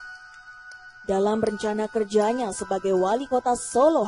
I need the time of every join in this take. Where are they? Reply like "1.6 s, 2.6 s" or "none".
1.0 s